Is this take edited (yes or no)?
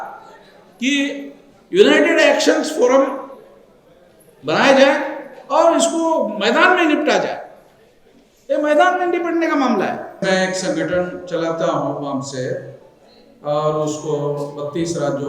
yes